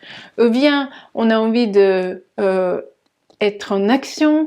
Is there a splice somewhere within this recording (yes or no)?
no